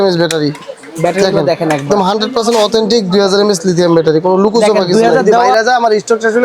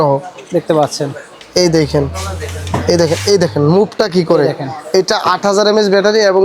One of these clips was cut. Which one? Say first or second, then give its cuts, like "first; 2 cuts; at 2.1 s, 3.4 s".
first; 1 cut; at 5.4 s